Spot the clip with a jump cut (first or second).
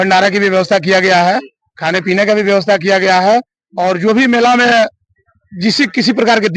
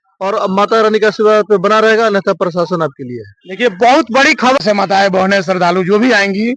second